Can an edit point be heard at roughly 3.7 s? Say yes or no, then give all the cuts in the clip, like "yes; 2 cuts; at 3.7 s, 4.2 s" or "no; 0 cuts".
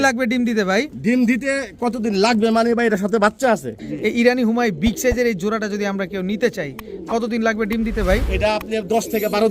yes; 1 cut; at 3.7 s